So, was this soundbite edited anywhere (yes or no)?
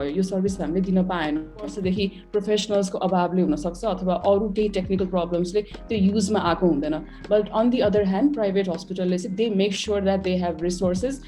yes